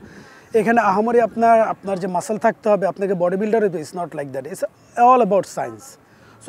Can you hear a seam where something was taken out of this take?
no; 0 cuts

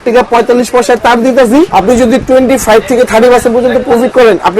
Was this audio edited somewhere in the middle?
yes; 1 cut; at 1.7 s

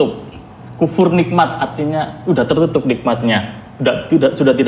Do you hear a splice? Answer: no; 0 cuts

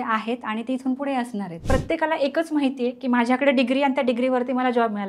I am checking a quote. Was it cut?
yes; 1 cut; at 1.5 s

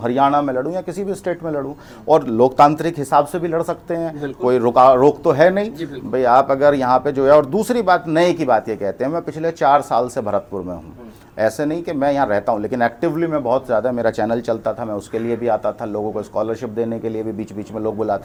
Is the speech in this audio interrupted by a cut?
no; 0 cuts

